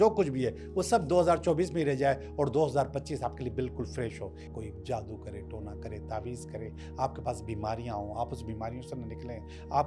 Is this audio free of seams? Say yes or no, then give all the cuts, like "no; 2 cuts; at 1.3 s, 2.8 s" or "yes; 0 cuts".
no; 1 cut; at 4.4 s